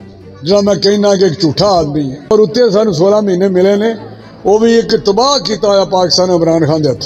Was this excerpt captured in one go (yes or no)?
no